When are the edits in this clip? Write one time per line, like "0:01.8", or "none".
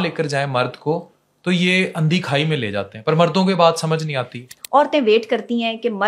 0:04.5